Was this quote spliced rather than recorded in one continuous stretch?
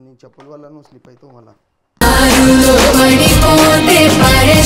no; 0 cuts

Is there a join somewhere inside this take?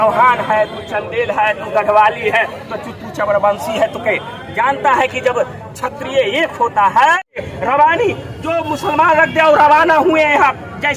yes; 1 cut; at 7.5 s

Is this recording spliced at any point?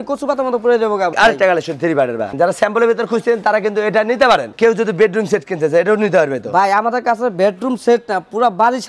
yes; 3 cuts; at 1.1 s, 2.3 s, 4.5 s

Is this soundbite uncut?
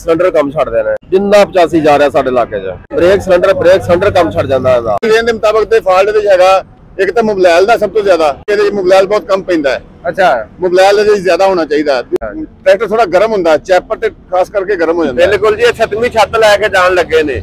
no; 6 cuts; at 1.0 s, 2.9 s, 5.1 s, 8.4 s, 12.1 s, 15.1 s

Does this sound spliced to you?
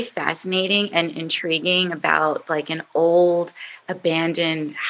no; 0 cuts

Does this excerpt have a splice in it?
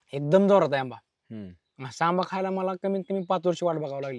no; 0 cuts

